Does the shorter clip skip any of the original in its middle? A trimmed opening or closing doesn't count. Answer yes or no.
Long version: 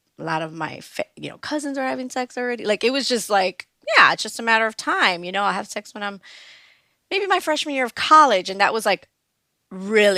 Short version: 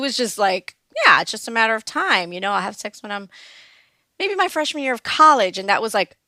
no